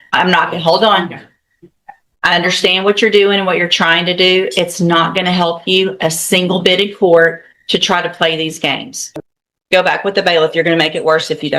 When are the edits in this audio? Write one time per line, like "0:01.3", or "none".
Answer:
0:09.0